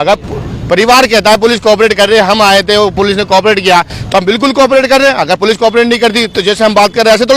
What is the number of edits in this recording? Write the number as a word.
zero